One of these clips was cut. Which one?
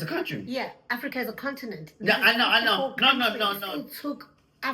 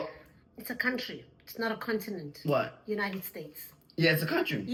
first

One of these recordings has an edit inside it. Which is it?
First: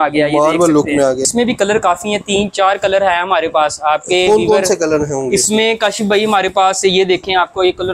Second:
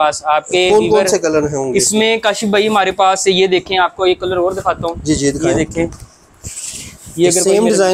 first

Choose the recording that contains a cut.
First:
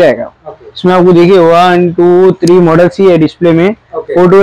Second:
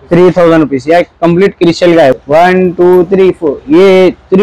second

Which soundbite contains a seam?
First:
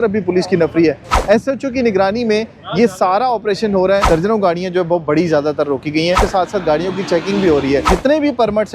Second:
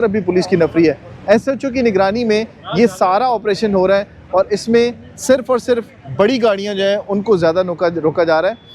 first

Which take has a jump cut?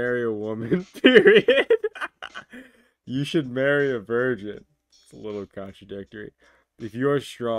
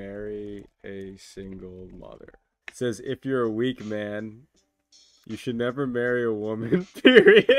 second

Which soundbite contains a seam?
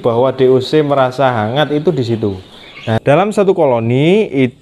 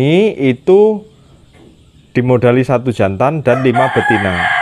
first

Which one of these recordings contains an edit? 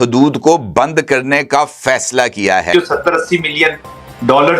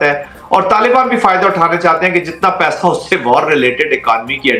first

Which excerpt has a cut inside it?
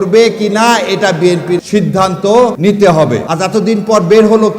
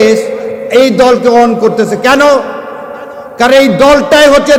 first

